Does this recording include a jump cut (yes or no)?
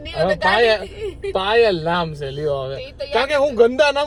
no